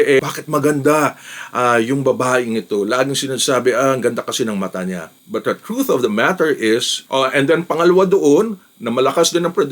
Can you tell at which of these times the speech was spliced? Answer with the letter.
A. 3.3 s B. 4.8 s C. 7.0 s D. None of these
C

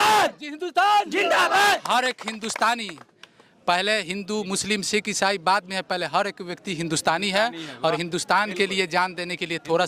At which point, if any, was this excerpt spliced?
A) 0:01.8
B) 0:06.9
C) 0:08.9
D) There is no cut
A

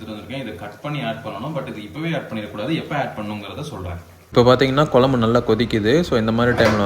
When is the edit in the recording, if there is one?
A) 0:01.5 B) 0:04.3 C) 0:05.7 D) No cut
B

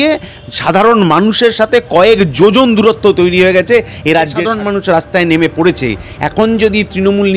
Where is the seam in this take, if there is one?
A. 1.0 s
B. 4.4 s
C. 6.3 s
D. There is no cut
B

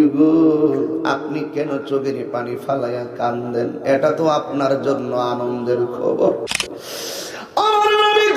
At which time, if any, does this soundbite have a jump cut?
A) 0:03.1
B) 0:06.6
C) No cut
B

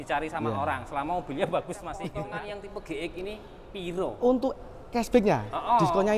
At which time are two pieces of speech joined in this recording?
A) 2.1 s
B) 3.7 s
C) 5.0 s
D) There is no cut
A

